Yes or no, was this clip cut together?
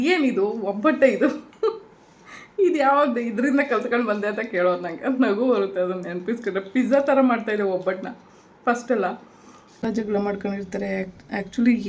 yes